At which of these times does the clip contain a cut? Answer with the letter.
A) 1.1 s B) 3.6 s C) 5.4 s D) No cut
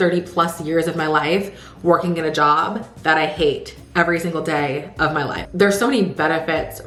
D